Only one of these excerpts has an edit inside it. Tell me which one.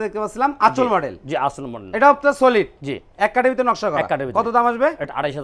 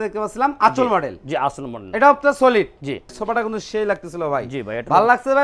second; 1 cut; at 3.1 s

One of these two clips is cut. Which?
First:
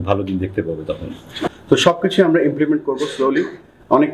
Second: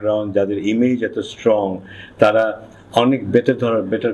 first; 1 cut; at 1.5 s

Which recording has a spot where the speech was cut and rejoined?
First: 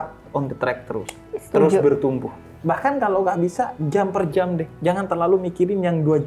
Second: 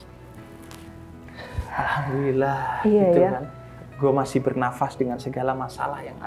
first; 1 cut; at 2.5 s

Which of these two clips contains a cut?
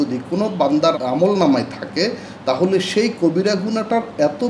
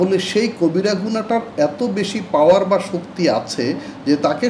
first; 1 cut; at 1.0 s

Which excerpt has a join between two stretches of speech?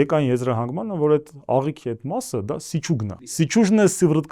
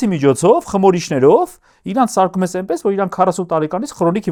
first; 1 cut; at 3.4 s

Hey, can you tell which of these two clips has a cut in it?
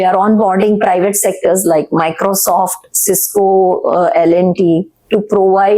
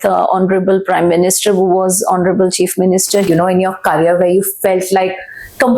second; 1 cut; at 3.2 s

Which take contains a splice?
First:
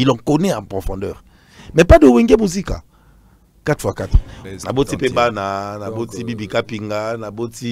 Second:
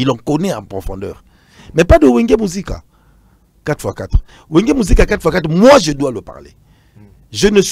first; 1 cut; at 4.3 s

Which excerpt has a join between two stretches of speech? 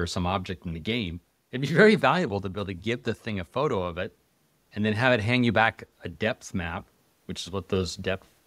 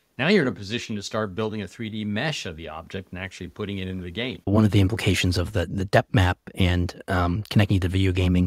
second; 1 cut; at 4.5 s

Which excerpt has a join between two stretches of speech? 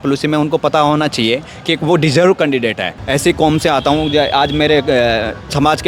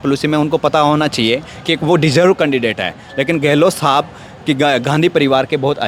first; 1 cut; at 2.9 s

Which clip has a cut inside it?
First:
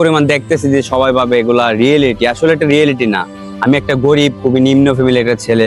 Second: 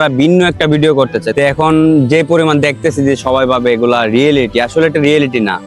second; 1 cut; at 1.3 s

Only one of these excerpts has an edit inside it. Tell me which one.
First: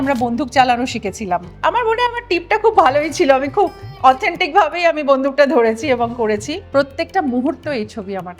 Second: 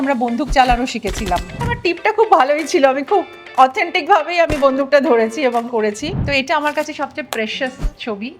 second; 2 cuts; at 1.6 s, 6.1 s

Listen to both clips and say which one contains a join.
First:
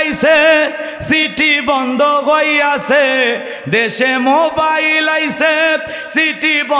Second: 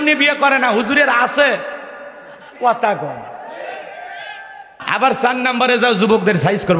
second; 1 cut; at 4.8 s

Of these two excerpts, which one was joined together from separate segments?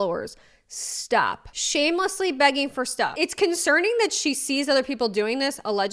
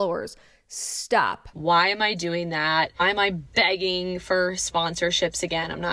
second; 1 cut; at 1.5 s

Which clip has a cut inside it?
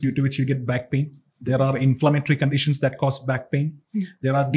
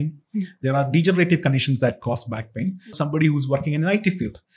second; 1 cut; at 2.9 s

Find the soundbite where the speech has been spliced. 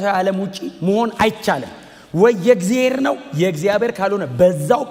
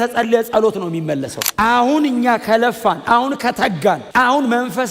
second; 2 cuts; at 1.4 s, 4.0 s

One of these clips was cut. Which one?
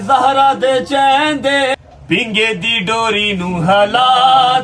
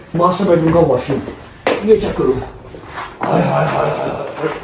first; 1 cut; at 1.7 s

